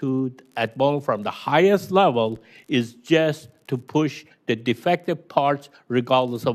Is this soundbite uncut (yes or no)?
yes